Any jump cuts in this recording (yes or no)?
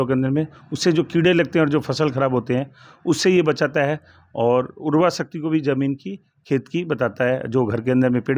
no